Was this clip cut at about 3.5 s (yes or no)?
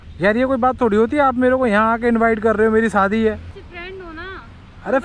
yes